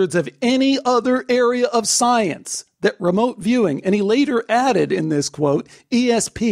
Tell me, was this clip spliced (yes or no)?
no